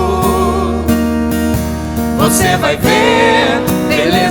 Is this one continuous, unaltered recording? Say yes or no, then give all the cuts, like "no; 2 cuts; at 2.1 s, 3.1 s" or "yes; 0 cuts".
yes; 0 cuts